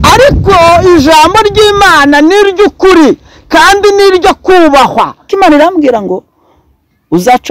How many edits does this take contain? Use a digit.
1